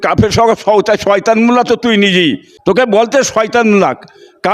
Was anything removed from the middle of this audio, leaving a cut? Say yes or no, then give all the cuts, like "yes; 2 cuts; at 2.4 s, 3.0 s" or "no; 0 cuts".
yes; 1 cut; at 2.5 s